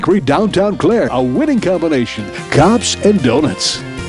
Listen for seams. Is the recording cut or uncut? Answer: uncut